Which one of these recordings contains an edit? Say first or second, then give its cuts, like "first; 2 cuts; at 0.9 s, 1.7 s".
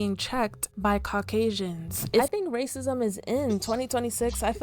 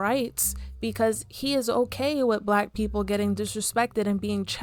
first; 1 cut; at 2.2 s